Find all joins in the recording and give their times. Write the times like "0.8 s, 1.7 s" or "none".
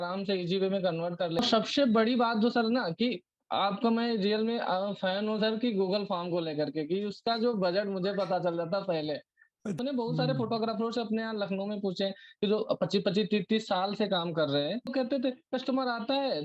1.4 s, 9.8 s, 14.9 s